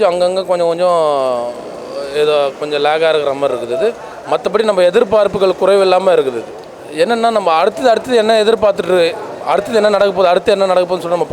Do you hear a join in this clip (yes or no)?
no